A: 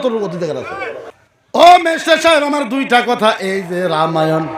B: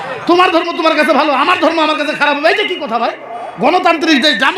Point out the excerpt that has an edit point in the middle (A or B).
A